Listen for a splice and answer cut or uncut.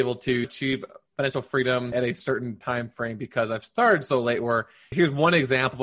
uncut